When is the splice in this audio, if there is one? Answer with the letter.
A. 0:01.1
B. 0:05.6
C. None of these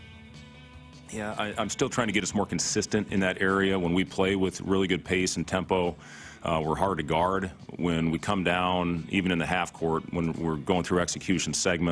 A